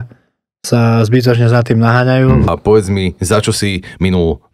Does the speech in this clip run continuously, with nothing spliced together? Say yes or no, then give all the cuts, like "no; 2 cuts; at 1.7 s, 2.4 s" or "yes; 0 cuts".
no; 1 cut; at 2.5 s